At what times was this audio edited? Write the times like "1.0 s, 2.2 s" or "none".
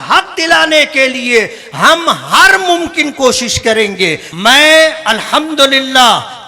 4.2 s